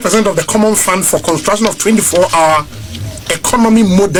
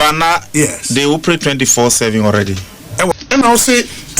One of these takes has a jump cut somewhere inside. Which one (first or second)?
second